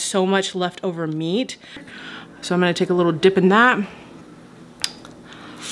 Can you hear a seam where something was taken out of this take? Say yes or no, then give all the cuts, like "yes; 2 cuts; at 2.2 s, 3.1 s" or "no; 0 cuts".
yes; 1 cut; at 1.9 s